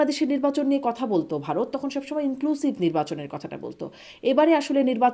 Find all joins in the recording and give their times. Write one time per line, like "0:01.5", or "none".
none